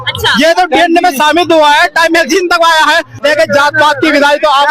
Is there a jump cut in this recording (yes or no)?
yes